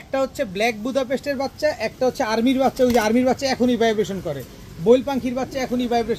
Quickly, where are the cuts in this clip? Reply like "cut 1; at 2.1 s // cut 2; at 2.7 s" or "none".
none